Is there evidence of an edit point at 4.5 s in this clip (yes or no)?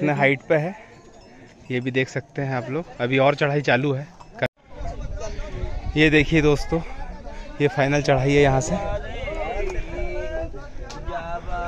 yes